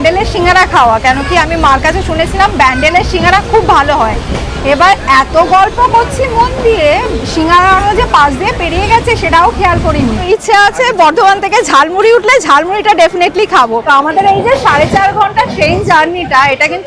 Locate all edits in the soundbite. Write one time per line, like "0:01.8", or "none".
0:10.2
0:13.8